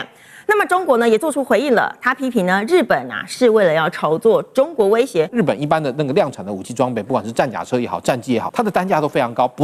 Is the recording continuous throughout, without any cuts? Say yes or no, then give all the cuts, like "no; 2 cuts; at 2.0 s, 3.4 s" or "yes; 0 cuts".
no; 2 cuts; at 5.3 s, 8.5 s